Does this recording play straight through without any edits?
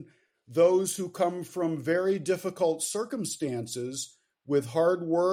yes; 0 cuts

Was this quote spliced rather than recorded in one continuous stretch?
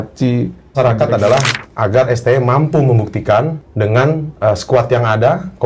yes; 2 cuts; at 0.7 s, 3.6 s

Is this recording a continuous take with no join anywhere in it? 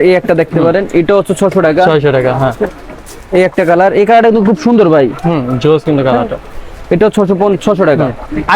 yes; 0 cuts

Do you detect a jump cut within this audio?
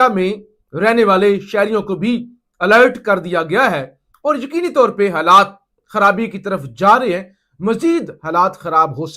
no; 0 cuts

